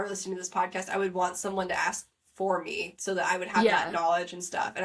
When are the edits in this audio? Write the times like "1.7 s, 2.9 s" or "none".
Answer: none